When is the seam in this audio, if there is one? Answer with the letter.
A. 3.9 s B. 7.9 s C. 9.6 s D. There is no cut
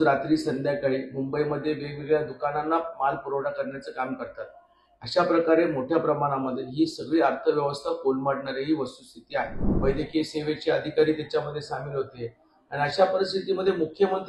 C